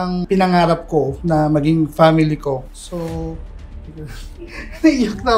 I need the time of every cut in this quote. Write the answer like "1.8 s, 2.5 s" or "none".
none